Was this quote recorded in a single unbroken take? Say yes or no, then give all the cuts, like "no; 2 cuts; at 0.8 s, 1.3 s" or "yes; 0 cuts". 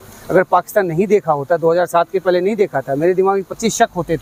yes; 0 cuts